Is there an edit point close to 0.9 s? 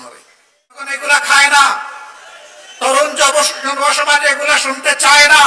yes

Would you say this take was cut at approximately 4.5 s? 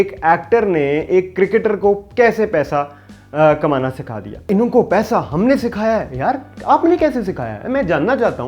yes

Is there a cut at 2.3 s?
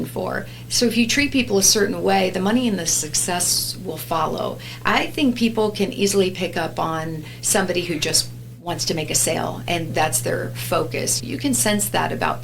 no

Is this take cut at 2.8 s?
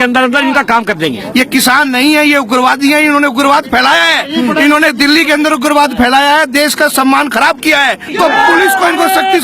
no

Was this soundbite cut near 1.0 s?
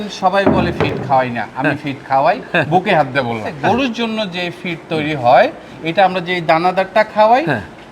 no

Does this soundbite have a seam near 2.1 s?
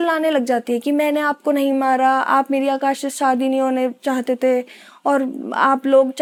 no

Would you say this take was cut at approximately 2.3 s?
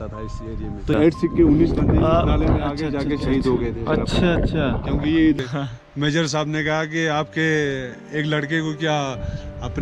no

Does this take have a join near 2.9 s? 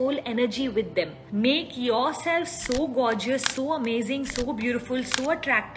no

